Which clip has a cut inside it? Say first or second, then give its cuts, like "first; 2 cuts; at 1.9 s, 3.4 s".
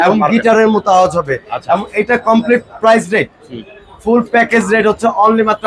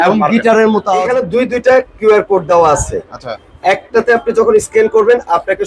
second; 1 cut; at 1.1 s